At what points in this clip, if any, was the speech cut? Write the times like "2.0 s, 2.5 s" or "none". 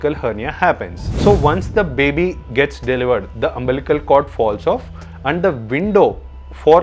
1.0 s